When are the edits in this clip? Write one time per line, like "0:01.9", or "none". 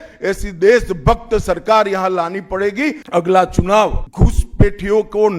0:03.0
0:04.0